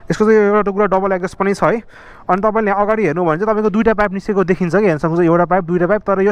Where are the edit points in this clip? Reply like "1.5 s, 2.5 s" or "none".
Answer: none